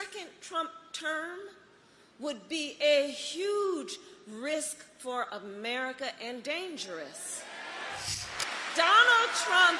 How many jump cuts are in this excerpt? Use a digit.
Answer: 1